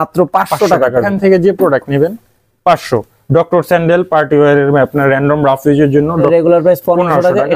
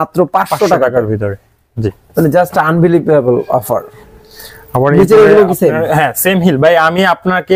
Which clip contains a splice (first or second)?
first